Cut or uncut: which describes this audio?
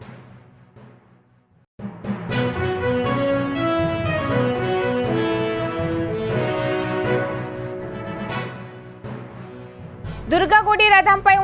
cut